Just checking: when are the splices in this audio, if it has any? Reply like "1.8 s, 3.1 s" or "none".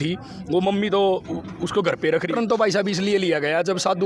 2.3 s